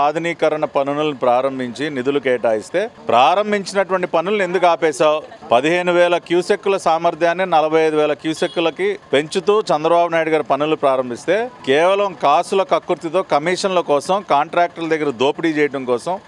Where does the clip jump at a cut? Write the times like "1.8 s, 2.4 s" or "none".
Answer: 2.9 s